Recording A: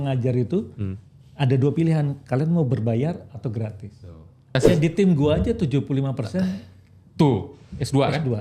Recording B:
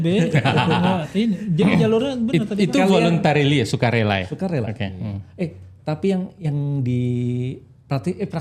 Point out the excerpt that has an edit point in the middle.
A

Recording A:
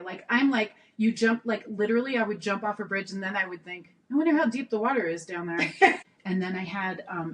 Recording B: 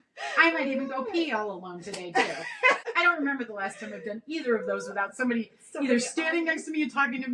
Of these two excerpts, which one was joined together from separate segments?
A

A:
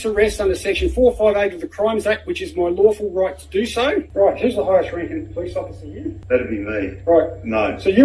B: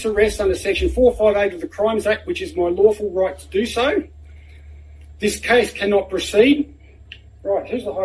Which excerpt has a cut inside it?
A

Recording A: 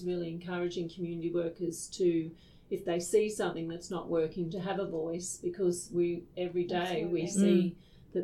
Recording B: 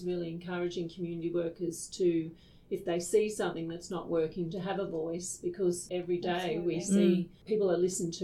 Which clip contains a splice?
B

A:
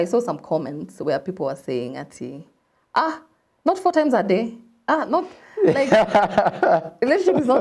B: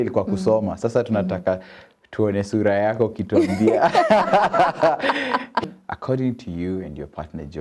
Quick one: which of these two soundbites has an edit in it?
B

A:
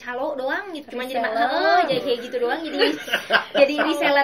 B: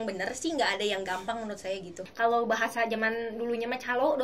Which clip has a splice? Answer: B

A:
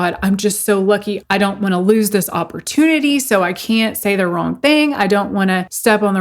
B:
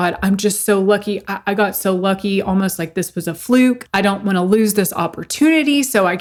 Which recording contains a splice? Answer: A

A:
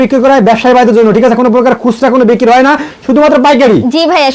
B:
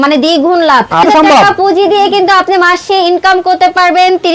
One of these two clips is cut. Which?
B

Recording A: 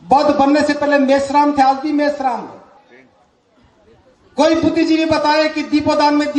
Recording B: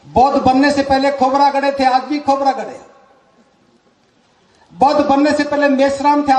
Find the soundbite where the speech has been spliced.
A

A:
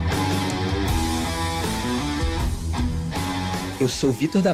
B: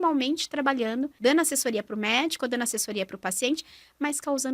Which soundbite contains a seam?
B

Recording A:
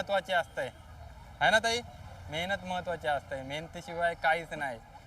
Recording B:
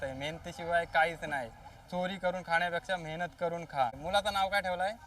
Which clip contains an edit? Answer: B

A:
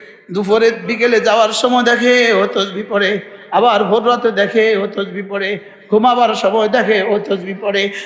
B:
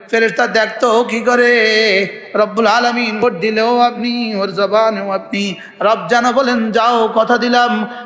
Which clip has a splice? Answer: B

